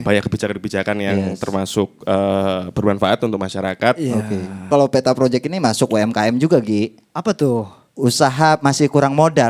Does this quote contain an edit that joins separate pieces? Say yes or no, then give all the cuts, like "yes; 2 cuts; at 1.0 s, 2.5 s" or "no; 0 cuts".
yes; 1 cut; at 4.7 s